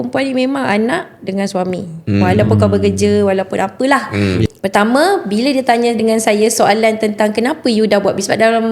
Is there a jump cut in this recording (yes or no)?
yes